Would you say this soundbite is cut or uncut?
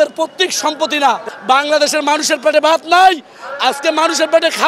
cut